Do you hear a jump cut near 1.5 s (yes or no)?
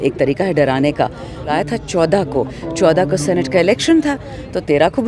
yes